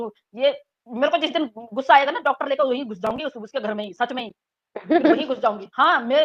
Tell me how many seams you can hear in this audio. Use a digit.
0